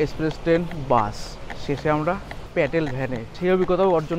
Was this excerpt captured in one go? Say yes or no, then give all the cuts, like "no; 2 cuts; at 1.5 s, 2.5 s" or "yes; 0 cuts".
no; 2 cuts; at 2.3 s, 3.3 s